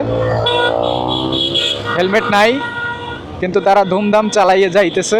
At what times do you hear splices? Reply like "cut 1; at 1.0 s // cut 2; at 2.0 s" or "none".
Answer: none